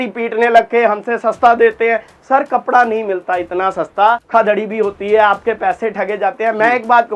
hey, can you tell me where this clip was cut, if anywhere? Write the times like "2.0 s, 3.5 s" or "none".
4.3 s